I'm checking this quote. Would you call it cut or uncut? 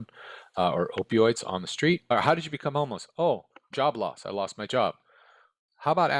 cut